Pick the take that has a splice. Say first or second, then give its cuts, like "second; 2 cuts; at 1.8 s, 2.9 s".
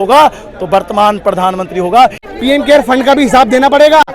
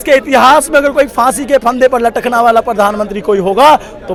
first; 1 cut; at 2.3 s